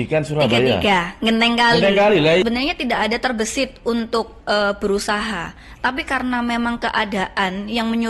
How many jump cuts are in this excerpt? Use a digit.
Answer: 1